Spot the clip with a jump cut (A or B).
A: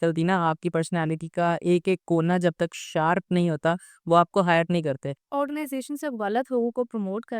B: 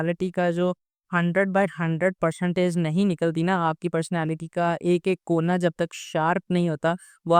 A